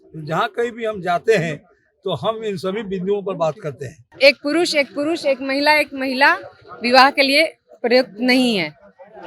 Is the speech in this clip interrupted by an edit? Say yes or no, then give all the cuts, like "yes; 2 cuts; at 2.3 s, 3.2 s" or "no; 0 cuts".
yes; 1 cut; at 4.1 s